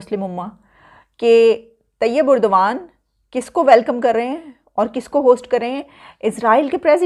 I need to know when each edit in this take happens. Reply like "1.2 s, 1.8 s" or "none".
none